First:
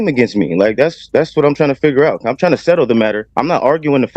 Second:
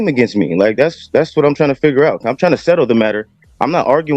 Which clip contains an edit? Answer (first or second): first